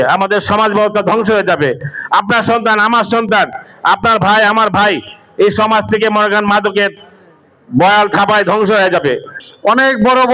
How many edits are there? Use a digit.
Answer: 0